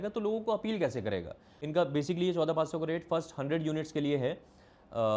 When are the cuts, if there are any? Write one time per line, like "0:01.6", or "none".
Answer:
0:01.5